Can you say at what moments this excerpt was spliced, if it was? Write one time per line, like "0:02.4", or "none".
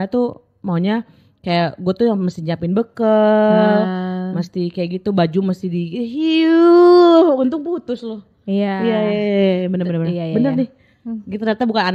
none